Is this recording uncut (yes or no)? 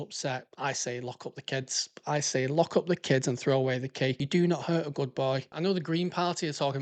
no